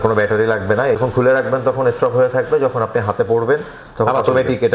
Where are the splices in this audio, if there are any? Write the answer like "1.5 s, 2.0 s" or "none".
1.0 s